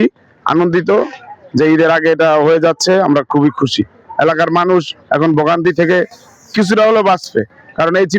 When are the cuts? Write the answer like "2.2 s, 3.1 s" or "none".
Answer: none